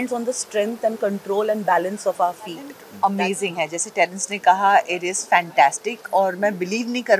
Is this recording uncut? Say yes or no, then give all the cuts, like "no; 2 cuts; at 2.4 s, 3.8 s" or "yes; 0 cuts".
no; 1 cut; at 2.8 s